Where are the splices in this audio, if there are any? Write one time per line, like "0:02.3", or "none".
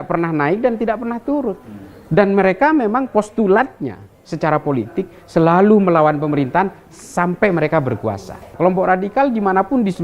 0:08.4